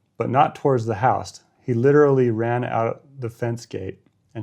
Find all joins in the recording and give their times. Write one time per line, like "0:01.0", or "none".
none